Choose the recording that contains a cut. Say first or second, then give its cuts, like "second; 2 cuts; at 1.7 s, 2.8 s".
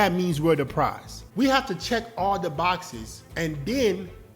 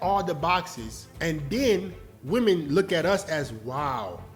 first; 1 cut; at 1.2 s